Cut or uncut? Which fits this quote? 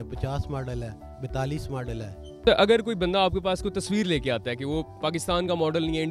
cut